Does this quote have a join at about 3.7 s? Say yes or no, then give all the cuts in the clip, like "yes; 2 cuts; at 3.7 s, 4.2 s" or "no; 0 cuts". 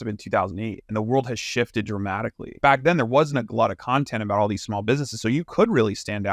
no; 1 cut; at 2.4 s